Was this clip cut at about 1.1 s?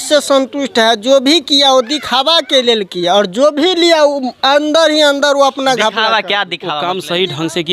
no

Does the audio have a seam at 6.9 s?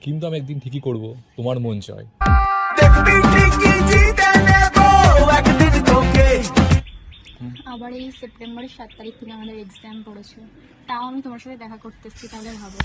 yes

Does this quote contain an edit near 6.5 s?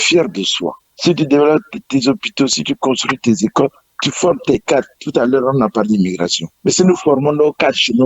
yes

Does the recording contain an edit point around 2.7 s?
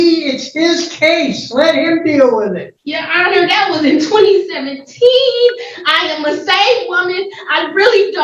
yes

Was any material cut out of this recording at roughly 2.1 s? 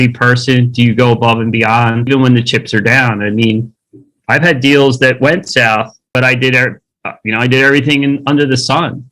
yes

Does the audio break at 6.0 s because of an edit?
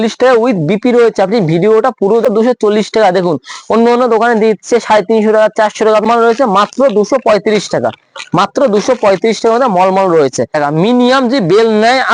yes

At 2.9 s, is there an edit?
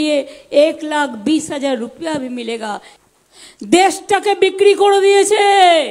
yes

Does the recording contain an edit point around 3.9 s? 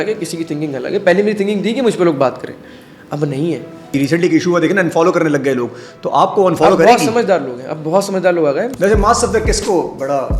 yes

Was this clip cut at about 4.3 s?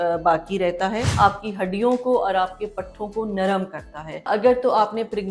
yes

